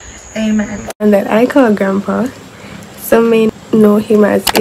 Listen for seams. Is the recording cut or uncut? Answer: cut